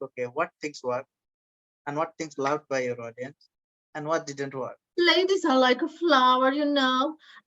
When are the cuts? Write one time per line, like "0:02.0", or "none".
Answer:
0:04.8